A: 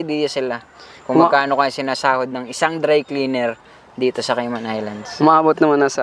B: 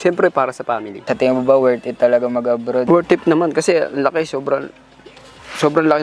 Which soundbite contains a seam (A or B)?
B